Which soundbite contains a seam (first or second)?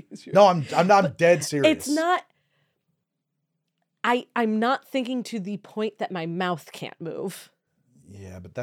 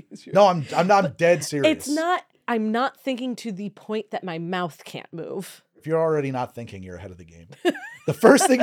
second